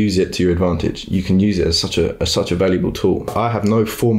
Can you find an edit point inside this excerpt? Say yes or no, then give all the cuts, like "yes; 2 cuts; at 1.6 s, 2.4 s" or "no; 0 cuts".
yes; 1 cut; at 3.3 s